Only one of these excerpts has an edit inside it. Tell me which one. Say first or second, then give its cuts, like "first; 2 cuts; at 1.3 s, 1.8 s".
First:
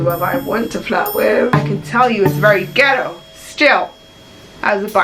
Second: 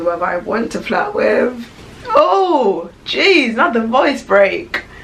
first; 1 cut; at 1.6 s